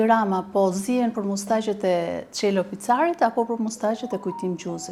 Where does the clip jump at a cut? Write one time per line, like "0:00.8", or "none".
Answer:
none